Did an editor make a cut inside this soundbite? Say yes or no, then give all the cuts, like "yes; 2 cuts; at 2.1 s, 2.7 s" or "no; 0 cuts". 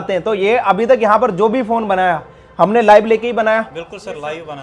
no; 0 cuts